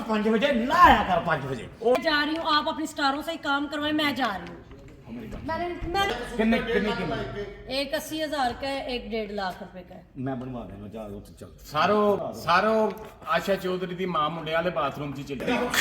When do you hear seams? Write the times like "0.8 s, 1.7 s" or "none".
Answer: 2.0 s, 6.1 s, 12.3 s